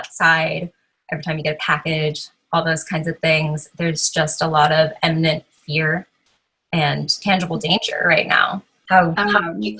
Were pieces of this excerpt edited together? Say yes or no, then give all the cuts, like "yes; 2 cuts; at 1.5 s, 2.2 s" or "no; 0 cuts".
yes; 2 cuts; at 7.2 s, 8.7 s